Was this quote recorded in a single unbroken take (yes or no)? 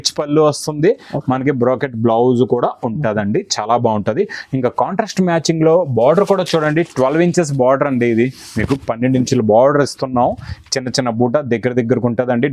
yes